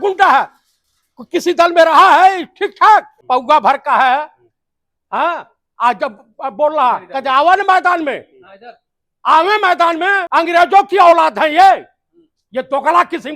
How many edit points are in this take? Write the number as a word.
two